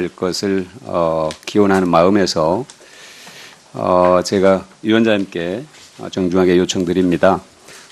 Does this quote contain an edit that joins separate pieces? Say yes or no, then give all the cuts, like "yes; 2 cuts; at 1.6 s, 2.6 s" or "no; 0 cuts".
no; 0 cuts